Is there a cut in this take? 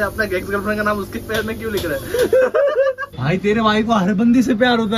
yes; 1 cut; at 3.1 s

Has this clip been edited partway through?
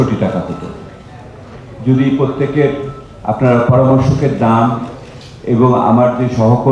no; 0 cuts

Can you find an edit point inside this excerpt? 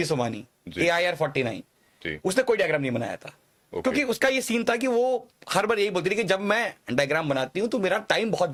no; 0 cuts

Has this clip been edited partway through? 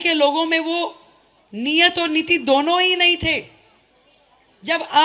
no; 0 cuts

